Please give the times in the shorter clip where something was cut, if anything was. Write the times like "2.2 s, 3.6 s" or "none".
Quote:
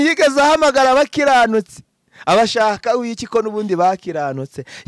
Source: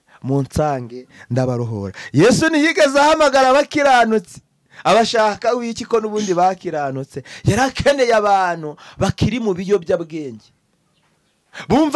none